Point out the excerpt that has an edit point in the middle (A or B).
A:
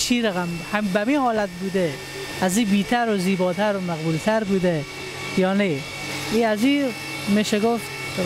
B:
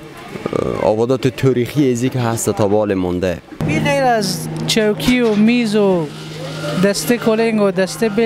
B